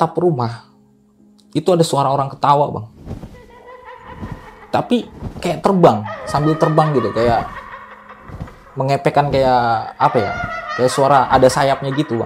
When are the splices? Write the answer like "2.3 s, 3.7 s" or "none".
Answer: none